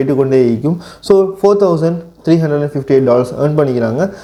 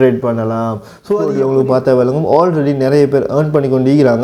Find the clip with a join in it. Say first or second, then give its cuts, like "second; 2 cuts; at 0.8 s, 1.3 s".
second; 1 cut; at 1.3 s